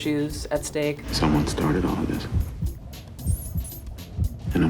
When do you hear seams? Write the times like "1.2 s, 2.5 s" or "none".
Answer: 1.0 s

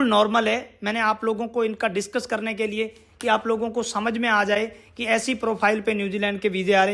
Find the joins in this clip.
none

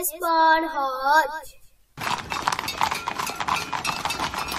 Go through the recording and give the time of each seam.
1.9 s

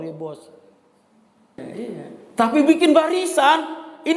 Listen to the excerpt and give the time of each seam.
1.6 s

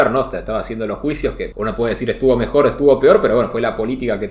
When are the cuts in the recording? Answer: 1.5 s

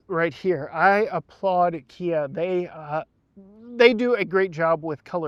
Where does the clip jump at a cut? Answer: none

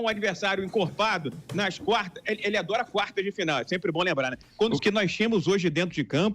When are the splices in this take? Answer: 4.4 s

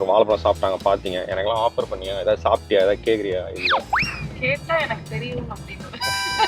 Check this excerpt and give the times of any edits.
none

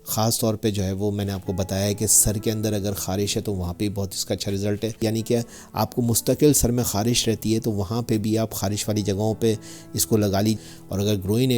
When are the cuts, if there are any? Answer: 5.0 s, 10.6 s

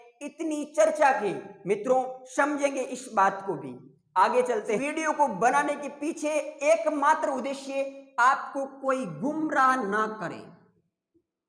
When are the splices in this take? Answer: none

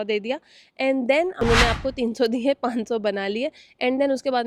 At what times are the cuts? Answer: 1.4 s

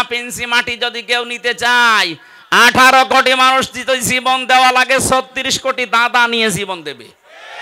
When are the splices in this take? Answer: none

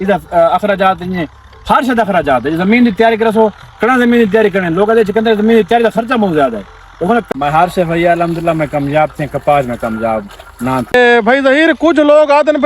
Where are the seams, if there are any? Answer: 7.3 s, 10.9 s

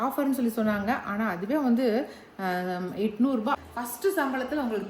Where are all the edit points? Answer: 3.6 s

